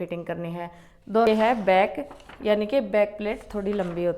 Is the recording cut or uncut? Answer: cut